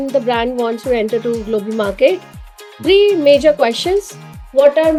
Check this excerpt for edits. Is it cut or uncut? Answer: uncut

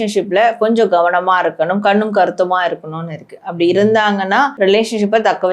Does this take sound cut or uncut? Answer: cut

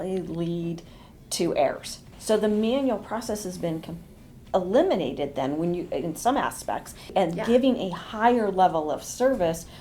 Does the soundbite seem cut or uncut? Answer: cut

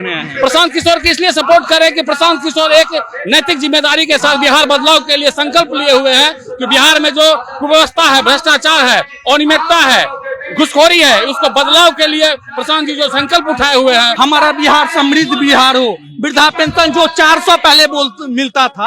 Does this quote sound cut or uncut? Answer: cut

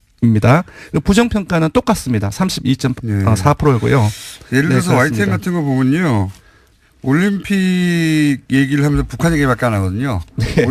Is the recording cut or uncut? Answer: uncut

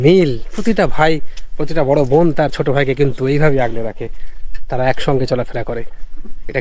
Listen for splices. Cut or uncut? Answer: uncut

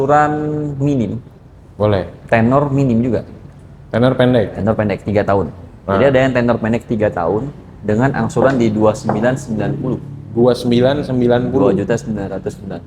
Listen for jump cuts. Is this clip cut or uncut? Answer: uncut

